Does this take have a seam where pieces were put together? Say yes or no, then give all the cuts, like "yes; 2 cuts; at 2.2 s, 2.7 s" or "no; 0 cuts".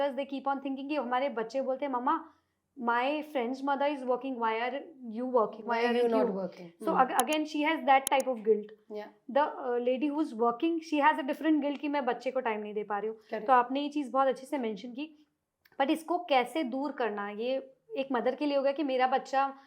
no; 0 cuts